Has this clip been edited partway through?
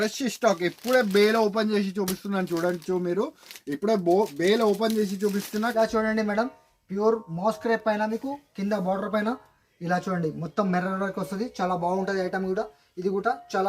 yes; 1 cut; at 5.6 s

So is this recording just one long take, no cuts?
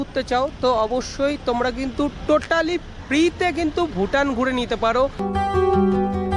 no; 1 cut; at 5.2 s

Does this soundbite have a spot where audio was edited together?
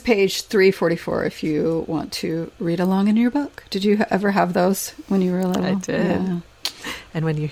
no; 0 cuts

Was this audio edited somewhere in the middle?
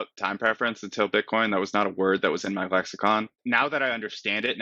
yes; 1 cut; at 3.3 s

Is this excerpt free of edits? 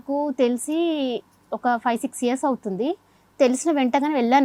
yes; 0 cuts

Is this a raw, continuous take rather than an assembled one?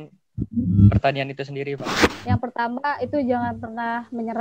no; 1 cut; at 2.1 s

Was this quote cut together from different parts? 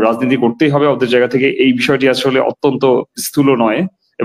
no; 0 cuts

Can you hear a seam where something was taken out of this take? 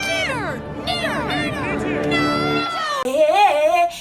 yes; 1 cut; at 3.0 s

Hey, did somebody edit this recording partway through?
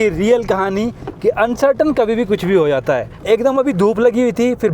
yes; 1 cut; at 3.2 s

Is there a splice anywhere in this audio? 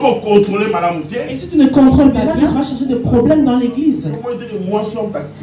yes; 1 cut; at 2.3 s

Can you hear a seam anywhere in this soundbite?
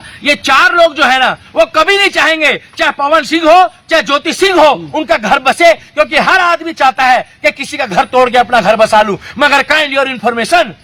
no; 0 cuts

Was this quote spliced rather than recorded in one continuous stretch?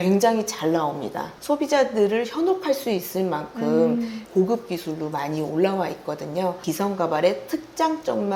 yes; 2 cuts; at 1.3 s, 6.6 s

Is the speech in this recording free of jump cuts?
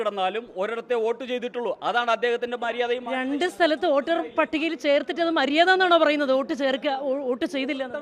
yes; 0 cuts

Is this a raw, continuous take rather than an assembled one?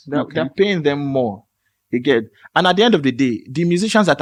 yes; 0 cuts

